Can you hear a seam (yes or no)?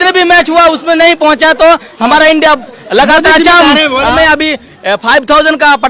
yes